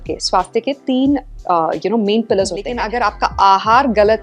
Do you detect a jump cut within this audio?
yes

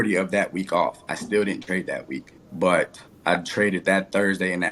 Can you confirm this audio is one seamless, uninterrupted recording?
yes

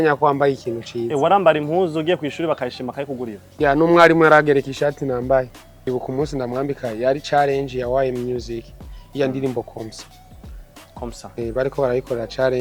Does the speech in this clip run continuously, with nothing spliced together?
no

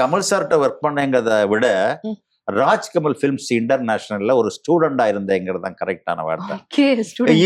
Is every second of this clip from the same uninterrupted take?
yes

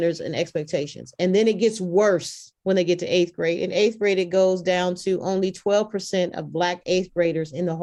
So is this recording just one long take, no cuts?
yes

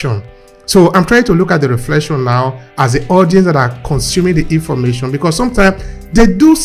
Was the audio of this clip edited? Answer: no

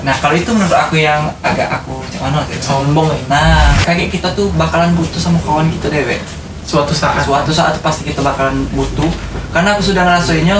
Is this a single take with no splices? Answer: no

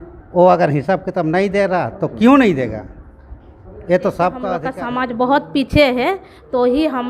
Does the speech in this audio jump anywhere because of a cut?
yes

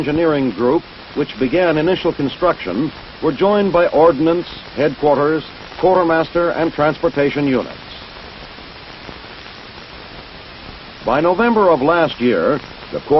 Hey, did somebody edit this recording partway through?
no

